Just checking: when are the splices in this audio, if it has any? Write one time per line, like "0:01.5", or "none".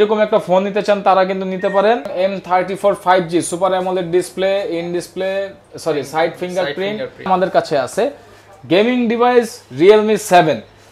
0:02.1
0:07.3